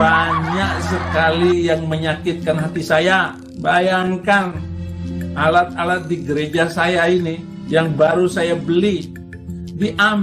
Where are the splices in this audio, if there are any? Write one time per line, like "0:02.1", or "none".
none

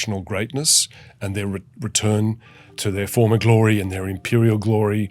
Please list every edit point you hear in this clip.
0:02.6

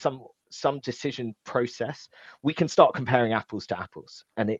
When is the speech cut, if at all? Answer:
none

